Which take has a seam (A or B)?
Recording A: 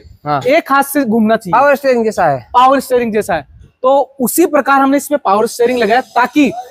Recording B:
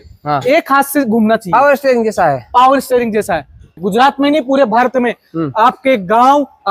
B